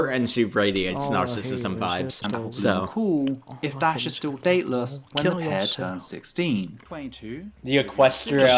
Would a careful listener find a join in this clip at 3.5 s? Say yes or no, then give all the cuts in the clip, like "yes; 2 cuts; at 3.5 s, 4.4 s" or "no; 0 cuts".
no; 1 cut; at 6.8 s